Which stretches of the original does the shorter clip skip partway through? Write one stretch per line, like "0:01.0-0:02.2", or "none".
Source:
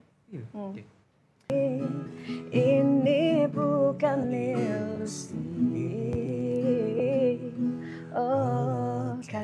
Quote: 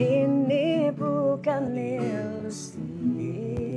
none